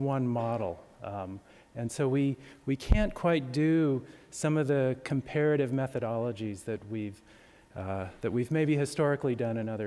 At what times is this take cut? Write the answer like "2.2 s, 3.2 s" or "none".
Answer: 6.3 s